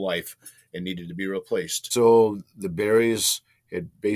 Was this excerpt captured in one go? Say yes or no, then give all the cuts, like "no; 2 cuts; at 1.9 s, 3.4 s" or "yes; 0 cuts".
no; 1 cut; at 1.8 s